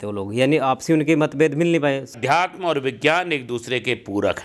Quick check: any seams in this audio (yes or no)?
yes